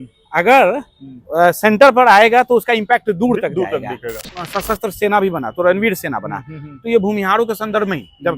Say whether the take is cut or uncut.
cut